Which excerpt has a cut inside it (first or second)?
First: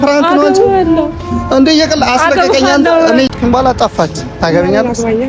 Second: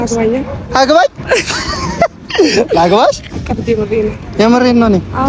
first